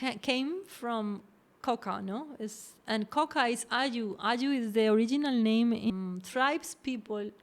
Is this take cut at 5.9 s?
yes; 1 cut; at 5.9 s

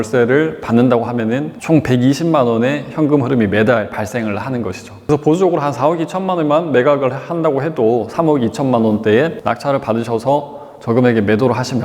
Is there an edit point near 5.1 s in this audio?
yes; 3 cuts; at 1.5 s, 5.1 s, 9.4 s

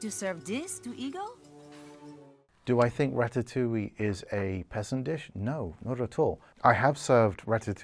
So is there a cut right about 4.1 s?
no; 2 cuts; at 2.4 s, 6.5 s

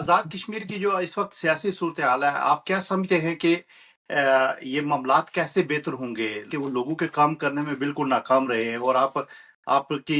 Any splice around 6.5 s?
yes; 1 cut; at 6.5 s

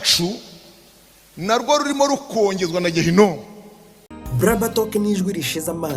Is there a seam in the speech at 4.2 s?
yes; 1 cut; at 4.2 s

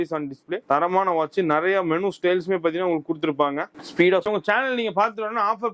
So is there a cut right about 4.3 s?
yes; 1 cut; at 4.3 s

